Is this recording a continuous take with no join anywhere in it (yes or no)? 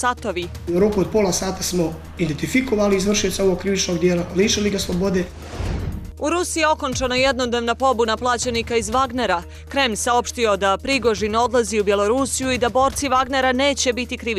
no